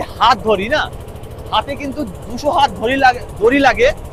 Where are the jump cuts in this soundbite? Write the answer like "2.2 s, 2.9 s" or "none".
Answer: none

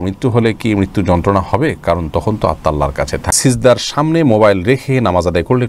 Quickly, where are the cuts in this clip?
3.3 s

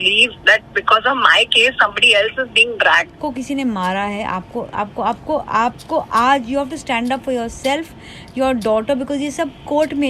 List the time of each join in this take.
3.2 s

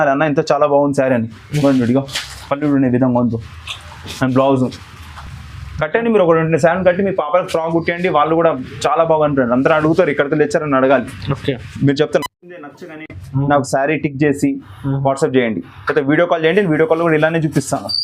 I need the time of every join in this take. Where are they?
none

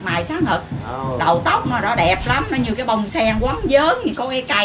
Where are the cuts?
none

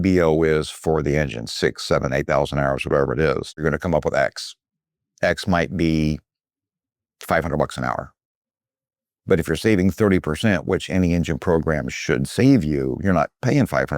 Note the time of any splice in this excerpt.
3.6 s

